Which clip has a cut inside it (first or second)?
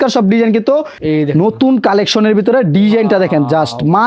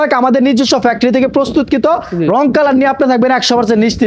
first